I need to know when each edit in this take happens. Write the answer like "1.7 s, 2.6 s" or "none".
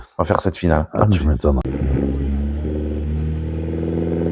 1.7 s